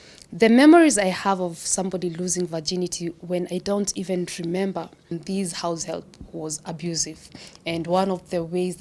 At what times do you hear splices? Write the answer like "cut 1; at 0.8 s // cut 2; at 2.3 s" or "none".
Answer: cut 1; at 5.2 s